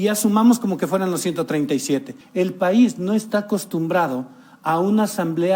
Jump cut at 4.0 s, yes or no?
no